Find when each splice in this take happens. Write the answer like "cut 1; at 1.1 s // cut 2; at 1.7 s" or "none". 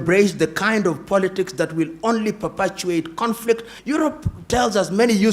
cut 1; at 3.7 s